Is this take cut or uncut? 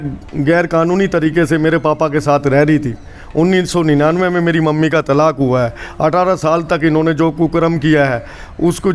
uncut